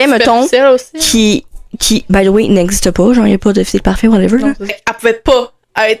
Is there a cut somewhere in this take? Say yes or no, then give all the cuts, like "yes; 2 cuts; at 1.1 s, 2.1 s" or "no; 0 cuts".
yes; 1 cut; at 4.8 s